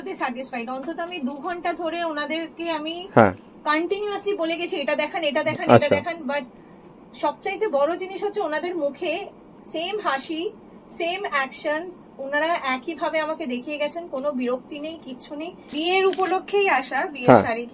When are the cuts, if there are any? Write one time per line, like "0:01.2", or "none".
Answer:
0:15.7